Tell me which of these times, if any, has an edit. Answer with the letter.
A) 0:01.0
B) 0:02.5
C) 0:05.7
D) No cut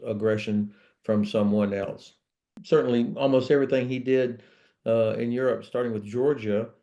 B